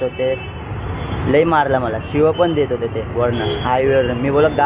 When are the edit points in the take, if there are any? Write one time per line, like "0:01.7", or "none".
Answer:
none

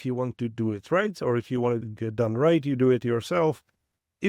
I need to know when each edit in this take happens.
0:01.9

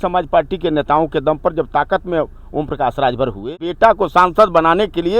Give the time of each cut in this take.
0:03.4

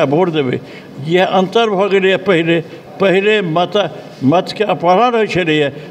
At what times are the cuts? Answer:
none

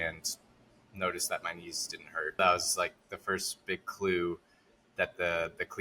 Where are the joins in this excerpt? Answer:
0:02.4

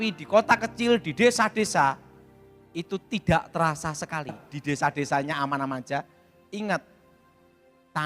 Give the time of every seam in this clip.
0:04.5

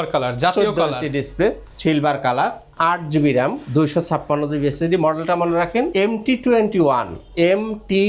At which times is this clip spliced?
none

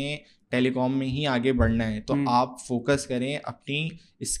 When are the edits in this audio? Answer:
none

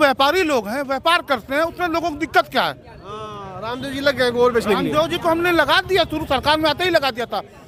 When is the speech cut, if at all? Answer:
none

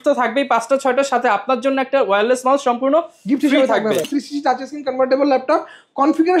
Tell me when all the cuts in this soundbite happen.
0:04.1

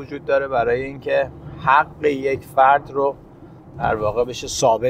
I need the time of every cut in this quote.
none

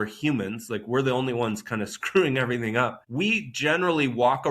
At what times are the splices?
0:03.0

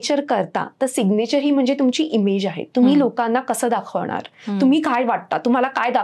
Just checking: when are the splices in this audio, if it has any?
none

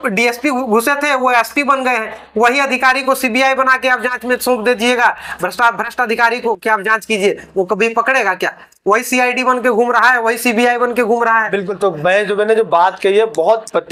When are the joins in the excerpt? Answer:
none

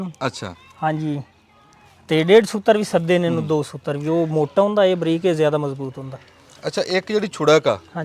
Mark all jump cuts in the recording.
none

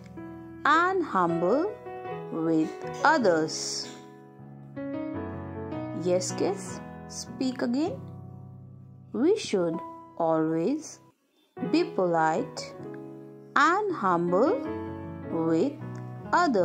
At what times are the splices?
0:03.7
0:06.0

